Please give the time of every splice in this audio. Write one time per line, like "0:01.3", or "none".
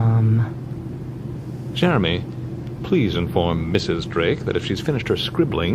0:02.1